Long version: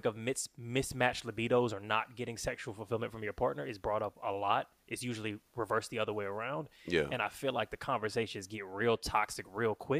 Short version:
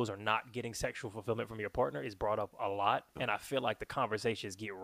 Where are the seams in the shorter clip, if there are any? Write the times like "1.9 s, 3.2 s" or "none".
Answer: 3.2 s